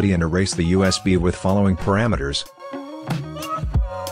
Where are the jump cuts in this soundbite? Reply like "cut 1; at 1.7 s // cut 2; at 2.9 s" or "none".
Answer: cut 1; at 2.4 s